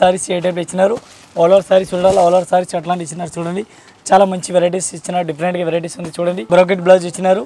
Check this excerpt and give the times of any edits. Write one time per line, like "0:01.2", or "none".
0:06.4